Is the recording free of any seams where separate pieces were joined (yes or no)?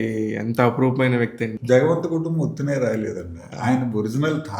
no